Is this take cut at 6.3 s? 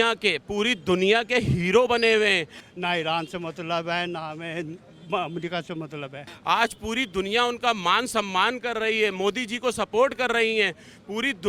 yes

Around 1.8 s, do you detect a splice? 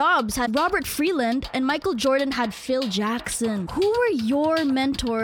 no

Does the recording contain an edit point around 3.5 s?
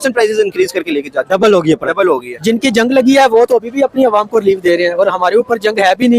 no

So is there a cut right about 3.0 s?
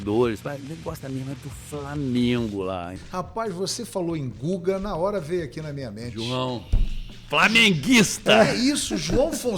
yes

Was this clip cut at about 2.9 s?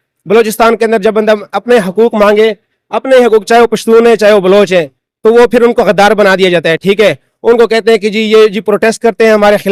no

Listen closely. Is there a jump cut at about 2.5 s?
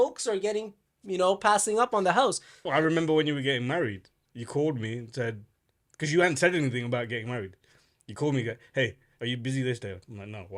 yes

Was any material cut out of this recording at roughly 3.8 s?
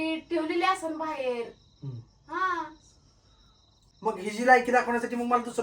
yes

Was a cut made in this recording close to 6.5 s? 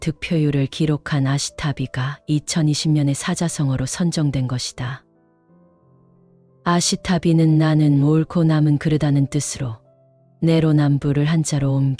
yes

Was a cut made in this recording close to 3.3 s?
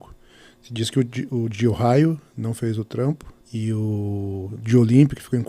yes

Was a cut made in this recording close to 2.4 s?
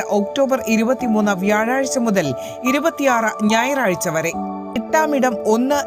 no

